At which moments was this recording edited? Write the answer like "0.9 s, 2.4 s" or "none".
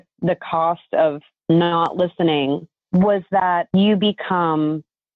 1.3 s, 2.7 s, 3.7 s

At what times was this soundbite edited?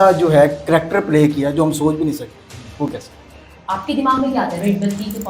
3.5 s

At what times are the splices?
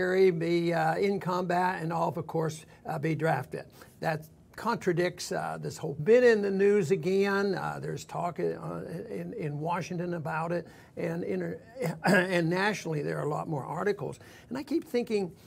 12.0 s

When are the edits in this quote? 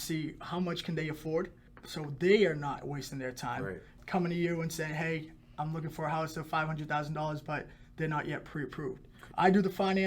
3.9 s, 9.2 s

